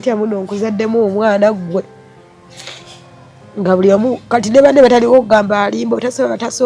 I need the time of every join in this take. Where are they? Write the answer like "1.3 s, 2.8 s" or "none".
none